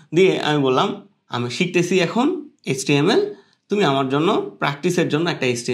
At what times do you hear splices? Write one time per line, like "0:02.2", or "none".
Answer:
none